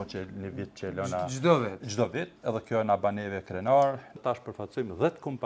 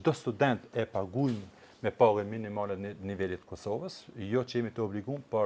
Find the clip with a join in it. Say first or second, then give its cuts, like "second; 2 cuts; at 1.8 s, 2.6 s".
first; 1 cut; at 4.2 s